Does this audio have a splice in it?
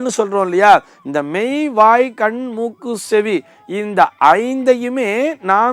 no; 0 cuts

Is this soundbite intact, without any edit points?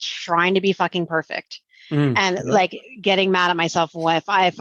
yes; 0 cuts

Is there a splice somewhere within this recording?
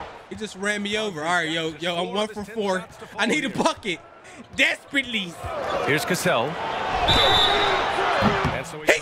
no; 0 cuts

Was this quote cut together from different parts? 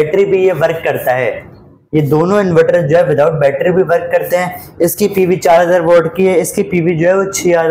no; 0 cuts

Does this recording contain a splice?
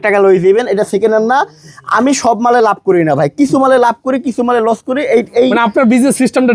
no; 0 cuts

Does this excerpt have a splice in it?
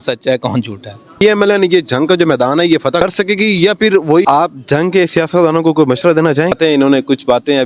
yes; 4 cuts; at 1.2 s, 3.0 s, 4.2 s, 6.5 s

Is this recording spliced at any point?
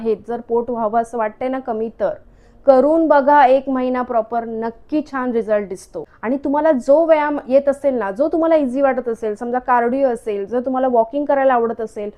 no; 0 cuts

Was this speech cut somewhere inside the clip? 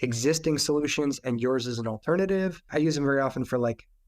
yes; 1 cut; at 2.6 s

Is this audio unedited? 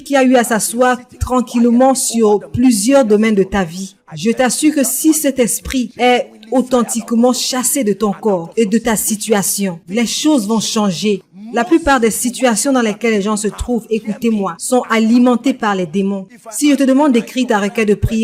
yes; 0 cuts

